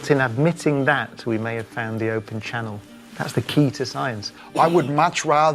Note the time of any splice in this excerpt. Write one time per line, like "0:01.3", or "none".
0:04.3